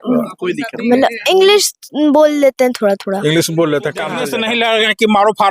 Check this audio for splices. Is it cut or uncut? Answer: cut